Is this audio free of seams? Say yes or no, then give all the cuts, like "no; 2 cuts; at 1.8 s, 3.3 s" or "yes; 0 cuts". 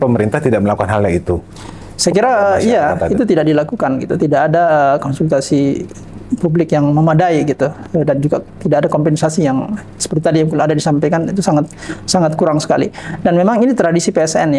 yes; 0 cuts